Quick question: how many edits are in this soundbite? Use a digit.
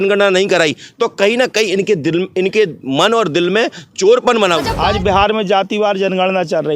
1